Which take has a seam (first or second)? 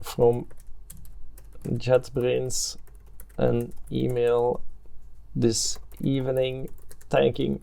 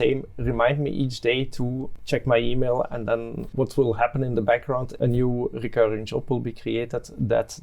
second